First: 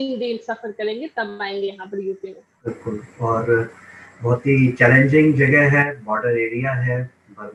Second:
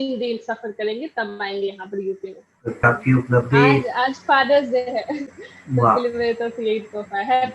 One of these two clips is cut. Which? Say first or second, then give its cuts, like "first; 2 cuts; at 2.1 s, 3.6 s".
second; 1 cut; at 2.8 s